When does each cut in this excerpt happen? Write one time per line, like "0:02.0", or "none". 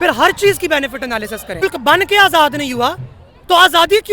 0:01.6